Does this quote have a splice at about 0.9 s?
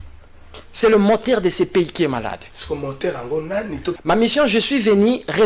no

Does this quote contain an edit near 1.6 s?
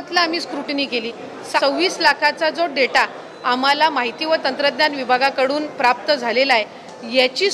yes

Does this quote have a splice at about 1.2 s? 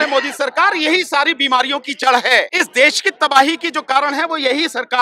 no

